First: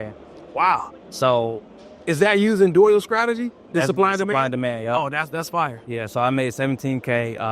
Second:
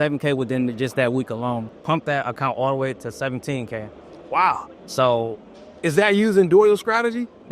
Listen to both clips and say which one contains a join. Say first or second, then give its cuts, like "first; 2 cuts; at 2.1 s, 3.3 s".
second; 1 cut; at 1.7 s